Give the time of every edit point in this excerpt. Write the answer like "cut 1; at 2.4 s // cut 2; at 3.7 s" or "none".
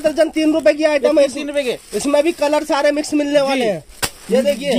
none